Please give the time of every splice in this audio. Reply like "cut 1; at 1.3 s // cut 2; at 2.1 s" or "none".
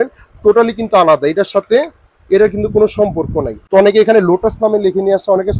cut 1; at 3.5 s

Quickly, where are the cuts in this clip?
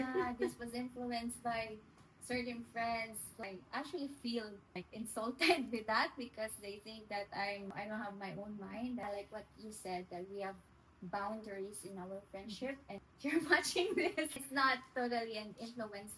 cut 1; at 3.4 s // cut 2; at 4.8 s // cut 3; at 7.7 s // cut 4; at 9.0 s // cut 5; at 13.0 s // cut 6; at 14.4 s

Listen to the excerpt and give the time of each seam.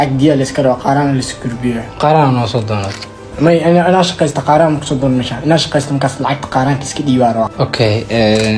none

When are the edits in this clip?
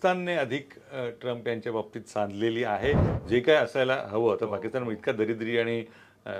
cut 1; at 3.1 s

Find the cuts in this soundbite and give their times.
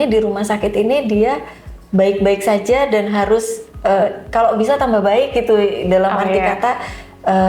none

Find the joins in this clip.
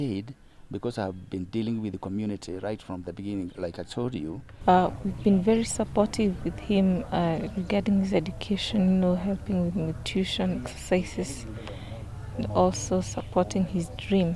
cut 1; at 4.5 s

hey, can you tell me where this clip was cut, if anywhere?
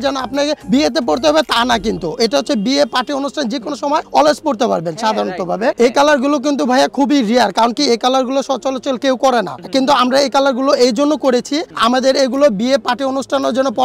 cut 1; at 5.8 s

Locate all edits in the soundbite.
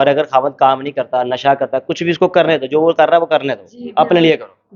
none

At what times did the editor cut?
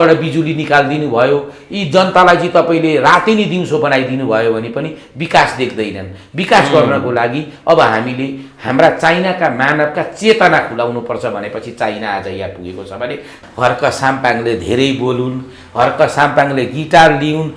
cut 1; at 13.4 s

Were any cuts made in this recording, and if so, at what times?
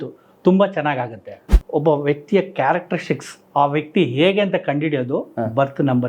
cut 1; at 1.4 s

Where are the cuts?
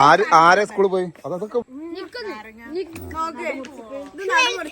cut 1; at 1.6 s

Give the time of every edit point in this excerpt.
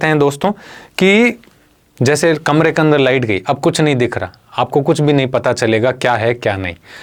none

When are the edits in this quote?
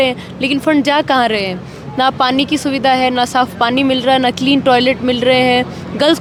none

